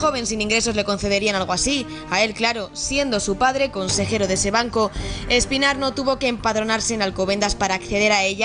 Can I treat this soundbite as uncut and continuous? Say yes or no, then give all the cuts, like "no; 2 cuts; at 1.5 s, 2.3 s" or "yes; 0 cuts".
yes; 0 cuts